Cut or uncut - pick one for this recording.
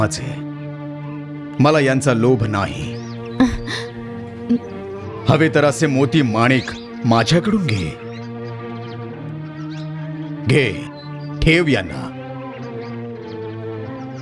cut